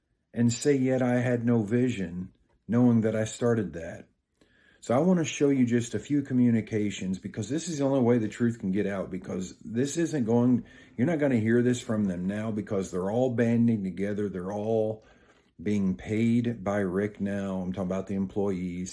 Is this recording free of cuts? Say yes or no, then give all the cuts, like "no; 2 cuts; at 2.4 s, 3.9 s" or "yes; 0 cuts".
yes; 0 cuts